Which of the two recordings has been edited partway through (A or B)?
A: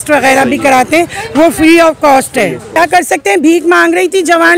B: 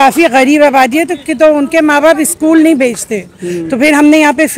A